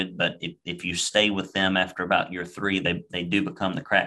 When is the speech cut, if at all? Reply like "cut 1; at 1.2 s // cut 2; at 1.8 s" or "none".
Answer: none